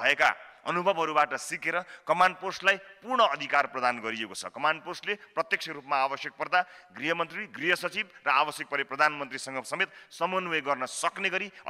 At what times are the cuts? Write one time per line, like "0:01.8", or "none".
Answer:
none

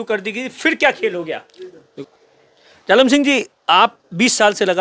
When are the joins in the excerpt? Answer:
0:01.9

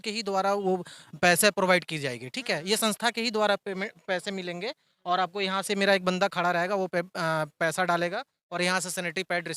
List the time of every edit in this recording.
none

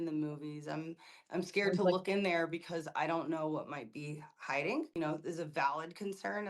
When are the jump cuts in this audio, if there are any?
0:05.0

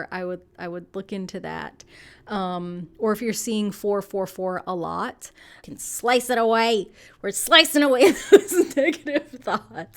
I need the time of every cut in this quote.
0:05.6

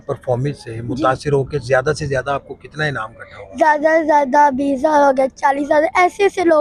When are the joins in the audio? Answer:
none

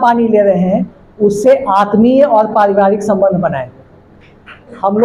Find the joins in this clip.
none

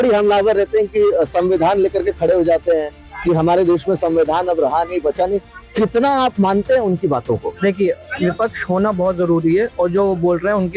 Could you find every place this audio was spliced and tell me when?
none

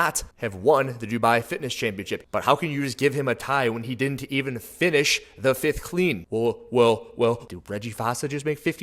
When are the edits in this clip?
0:02.2
0:07.4

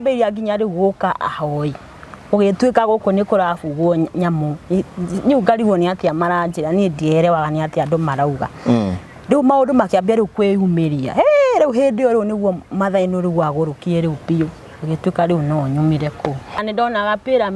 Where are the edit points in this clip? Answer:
0:16.6

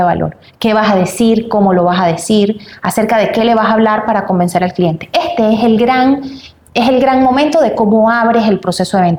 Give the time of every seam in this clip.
none

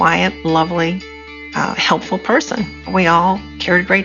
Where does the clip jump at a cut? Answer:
0:02.9

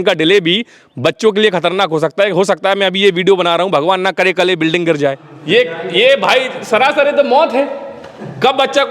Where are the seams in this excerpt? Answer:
0:05.3

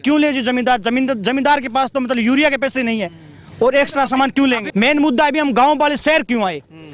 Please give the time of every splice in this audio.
0:04.6

